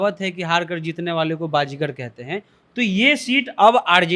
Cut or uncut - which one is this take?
uncut